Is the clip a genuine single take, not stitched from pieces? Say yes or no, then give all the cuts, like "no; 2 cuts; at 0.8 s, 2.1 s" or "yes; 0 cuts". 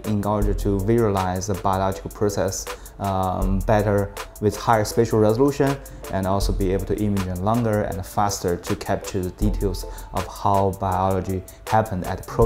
yes; 0 cuts